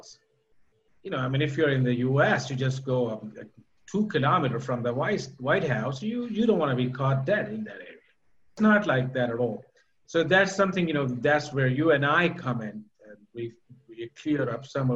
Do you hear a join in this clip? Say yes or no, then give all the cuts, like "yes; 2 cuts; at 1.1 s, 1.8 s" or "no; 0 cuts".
yes; 1 cut; at 8.6 s